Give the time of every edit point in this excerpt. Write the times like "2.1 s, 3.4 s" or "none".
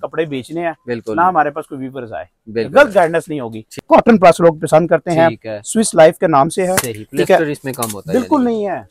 3.8 s